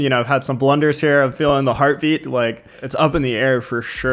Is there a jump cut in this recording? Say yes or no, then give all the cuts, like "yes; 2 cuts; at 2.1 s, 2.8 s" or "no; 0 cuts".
yes; 1 cut; at 2.8 s